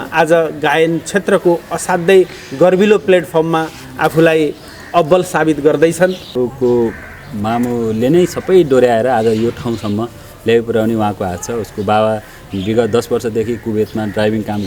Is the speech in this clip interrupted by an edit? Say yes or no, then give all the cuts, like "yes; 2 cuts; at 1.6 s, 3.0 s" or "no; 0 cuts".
yes; 1 cut; at 6.3 s